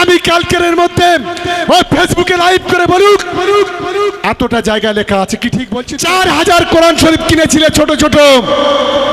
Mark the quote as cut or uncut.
cut